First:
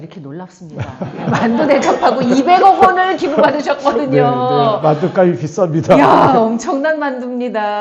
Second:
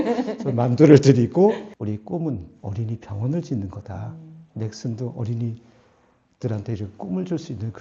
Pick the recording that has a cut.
second; 1 cut; at 1.7 s

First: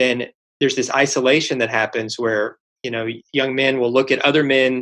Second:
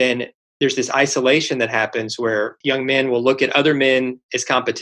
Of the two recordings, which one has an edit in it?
second; 1 cut; at 2.6 s

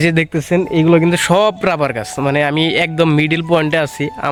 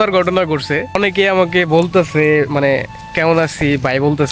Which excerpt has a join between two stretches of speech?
second; 1 cut; at 1.0 s

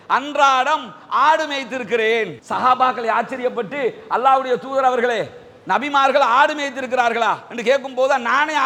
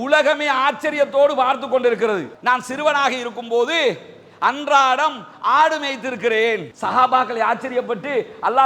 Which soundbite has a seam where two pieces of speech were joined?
second; 1 cut; at 2.3 s

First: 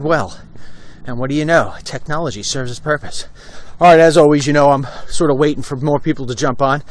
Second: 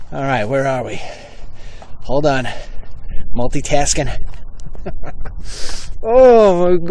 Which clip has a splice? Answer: first; 1 cut; at 2.2 s

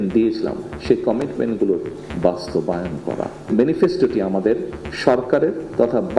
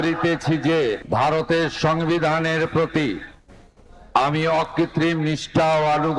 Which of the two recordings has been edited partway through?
first; 1 cut; at 3.4 s

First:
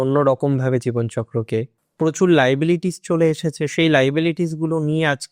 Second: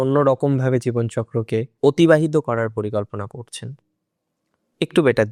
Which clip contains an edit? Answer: first; 1 cut; at 1.7 s

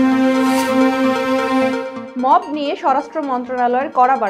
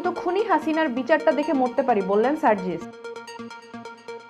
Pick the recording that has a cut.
first; 1 cut; at 1.9 s

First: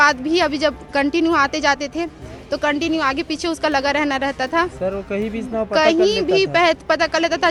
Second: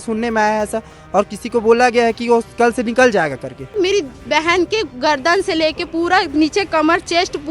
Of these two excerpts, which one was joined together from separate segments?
second; 1 cut; at 3.7 s

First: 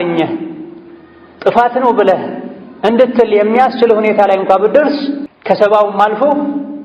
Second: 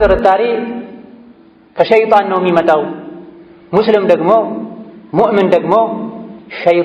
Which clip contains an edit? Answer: first; 1 cut; at 5.3 s

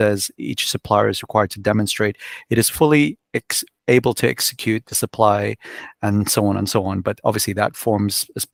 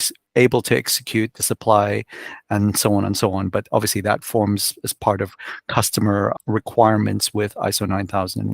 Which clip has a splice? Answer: second; 1 cut; at 6.3 s

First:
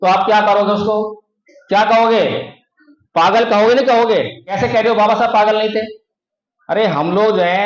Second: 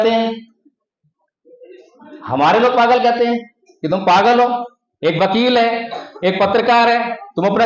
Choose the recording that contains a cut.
first; 1 cut; at 4.4 s

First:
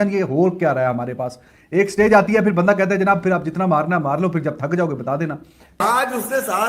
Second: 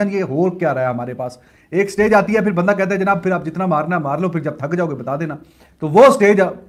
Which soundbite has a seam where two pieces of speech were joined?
first; 1 cut; at 5.8 s

